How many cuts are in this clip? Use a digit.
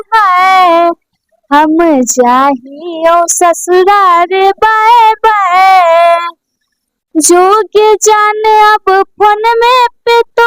0